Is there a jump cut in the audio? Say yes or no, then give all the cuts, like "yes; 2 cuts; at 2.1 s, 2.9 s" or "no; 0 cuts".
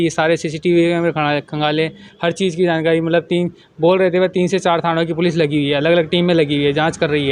no; 0 cuts